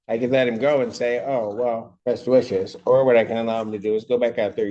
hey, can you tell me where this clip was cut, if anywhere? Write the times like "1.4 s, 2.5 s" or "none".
1.9 s